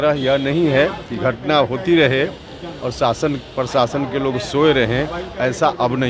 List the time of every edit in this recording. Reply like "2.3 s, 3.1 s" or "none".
none